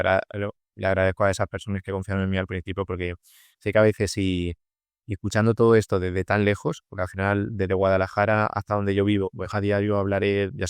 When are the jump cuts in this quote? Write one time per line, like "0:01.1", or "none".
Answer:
0:09.4